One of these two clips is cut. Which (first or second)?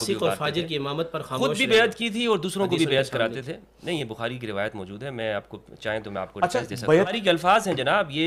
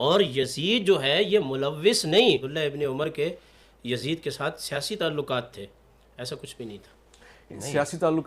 second